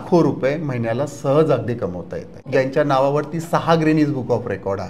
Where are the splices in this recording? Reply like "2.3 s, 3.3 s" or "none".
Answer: 2.3 s